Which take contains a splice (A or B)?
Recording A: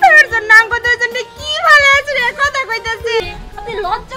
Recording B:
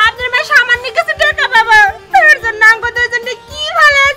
A